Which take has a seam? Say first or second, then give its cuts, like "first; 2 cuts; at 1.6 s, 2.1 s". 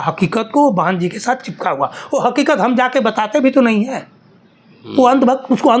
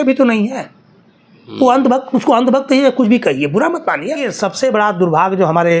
second; 1 cut; at 4.3 s